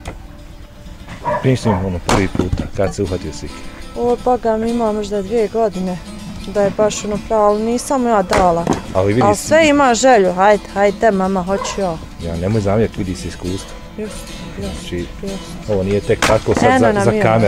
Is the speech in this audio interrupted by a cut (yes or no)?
no